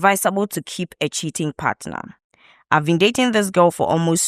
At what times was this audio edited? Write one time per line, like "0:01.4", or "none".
none